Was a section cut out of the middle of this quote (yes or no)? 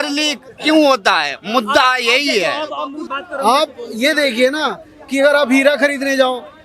yes